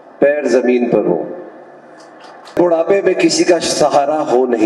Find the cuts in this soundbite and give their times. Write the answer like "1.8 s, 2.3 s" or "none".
2.5 s